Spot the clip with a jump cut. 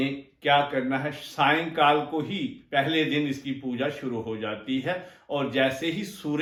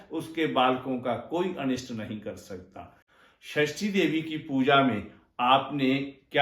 second; 1 cut; at 3.1 s

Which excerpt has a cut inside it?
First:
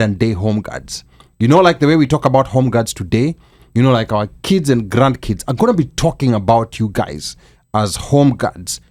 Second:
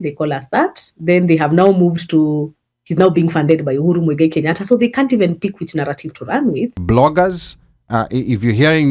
second; 1 cut; at 6.8 s

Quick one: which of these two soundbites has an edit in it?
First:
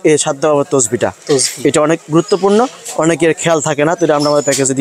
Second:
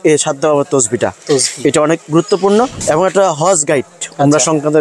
second; 1 cut; at 2.8 s

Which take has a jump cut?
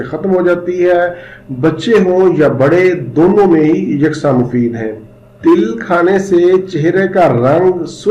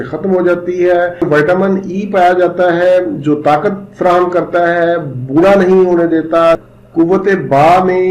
second; 2 cuts; at 1.2 s, 6.6 s

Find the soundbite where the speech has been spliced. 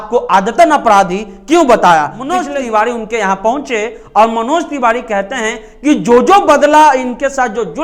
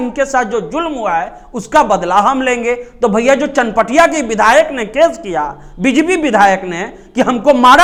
first; 1 cut; at 2.4 s

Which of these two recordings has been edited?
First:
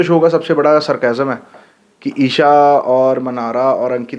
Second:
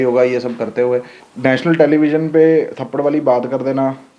second; 1 cut; at 1.2 s

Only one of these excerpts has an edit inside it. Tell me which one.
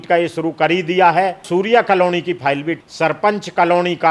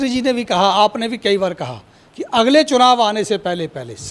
first; 2 cuts; at 1.4 s, 2.7 s

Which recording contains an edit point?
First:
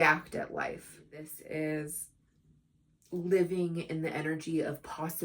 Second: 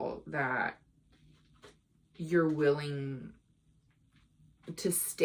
first; 1 cut; at 1.4 s

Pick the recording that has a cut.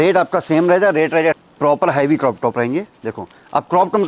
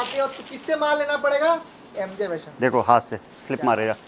first; 1 cut; at 1.4 s

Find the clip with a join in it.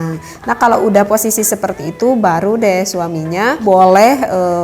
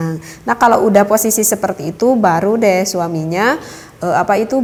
first; 1 cut; at 3.6 s

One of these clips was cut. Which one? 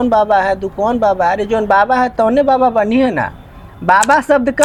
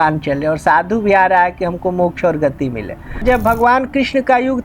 second; 1 cut; at 3.2 s

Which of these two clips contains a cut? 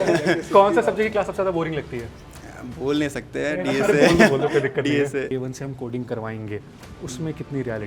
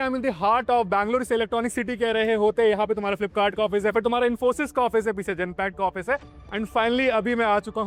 first; 1 cut; at 5.3 s

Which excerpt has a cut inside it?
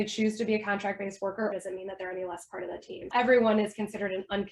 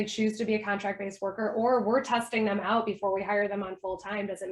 first; 2 cuts; at 1.5 s, 3.1 s

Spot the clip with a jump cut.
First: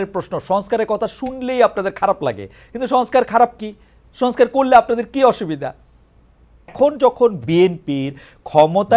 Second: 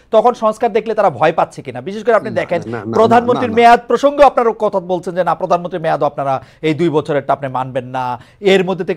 first; 1 cut; at 6.7 s

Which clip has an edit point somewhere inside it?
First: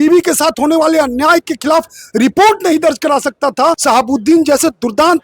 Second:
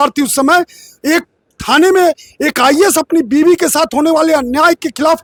first; 1 cut; at 3.8 s

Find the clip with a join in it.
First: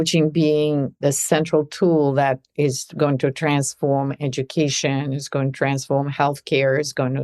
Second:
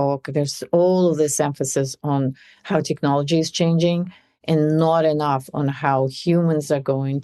first; 1 cut; at 1.0 s

